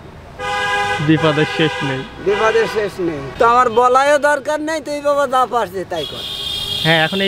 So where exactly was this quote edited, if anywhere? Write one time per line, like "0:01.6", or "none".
0:03.2